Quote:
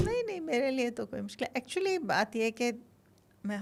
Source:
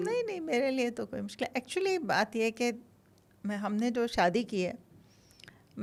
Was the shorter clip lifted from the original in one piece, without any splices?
yes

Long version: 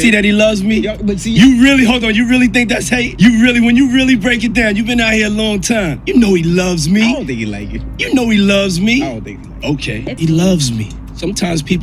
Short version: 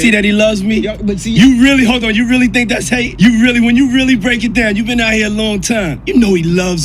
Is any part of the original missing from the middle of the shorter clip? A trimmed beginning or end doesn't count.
no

